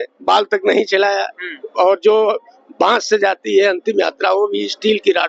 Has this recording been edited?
no; 0 cuts

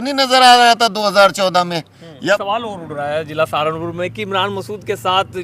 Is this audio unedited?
no; 1 cut; at 2.4 s

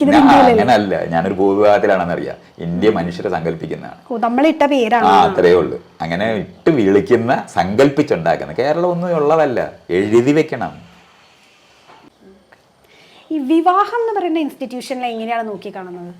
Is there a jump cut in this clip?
yes; 1 cut; at 12.1 s

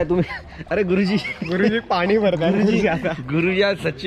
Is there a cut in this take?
no; 0 cuts

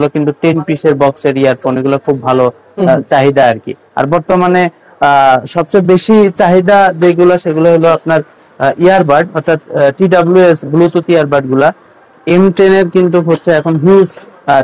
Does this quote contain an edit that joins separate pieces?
no; 0 cuts

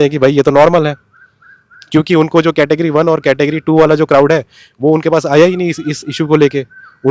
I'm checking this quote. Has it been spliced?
no; 0 cuts

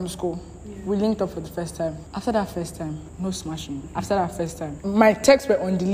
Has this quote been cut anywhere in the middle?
yes; 4 cuts; at 2.1 s, 3.1 s, 3.9 s, 4.8 s

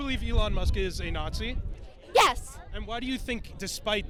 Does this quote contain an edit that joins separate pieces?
no; 0 cuts

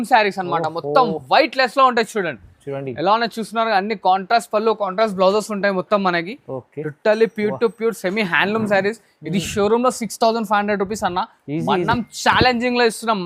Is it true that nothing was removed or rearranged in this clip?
yes; 0 cuts

